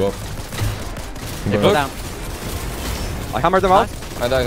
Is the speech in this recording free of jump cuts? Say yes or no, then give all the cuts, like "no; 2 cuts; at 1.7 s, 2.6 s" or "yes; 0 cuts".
yes; 0 cuts